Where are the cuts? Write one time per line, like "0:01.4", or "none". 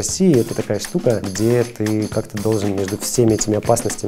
0:01.3